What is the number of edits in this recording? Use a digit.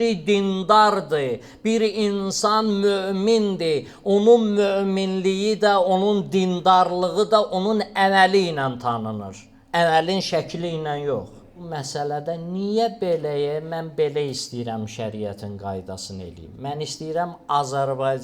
1